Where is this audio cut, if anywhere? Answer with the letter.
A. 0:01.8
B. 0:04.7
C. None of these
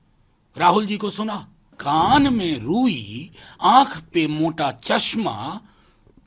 A